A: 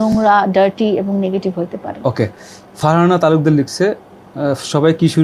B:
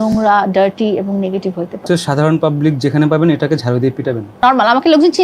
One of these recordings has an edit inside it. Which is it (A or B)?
B